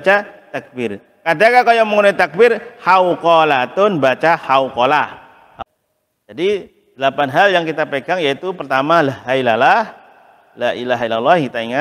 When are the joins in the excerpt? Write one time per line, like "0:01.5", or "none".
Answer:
0:05.6